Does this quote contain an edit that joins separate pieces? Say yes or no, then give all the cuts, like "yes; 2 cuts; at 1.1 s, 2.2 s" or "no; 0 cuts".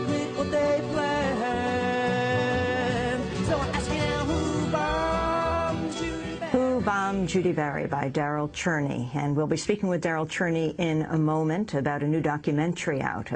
no; 0 cuts